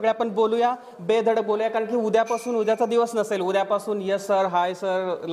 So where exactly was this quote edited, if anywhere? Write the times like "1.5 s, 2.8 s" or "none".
none